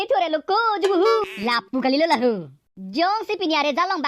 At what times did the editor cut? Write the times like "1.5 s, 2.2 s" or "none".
1.3 s